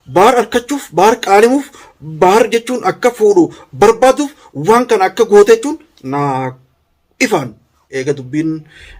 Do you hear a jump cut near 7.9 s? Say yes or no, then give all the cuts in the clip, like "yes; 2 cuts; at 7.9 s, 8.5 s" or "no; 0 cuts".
yes; 1 cut; at 7.9 s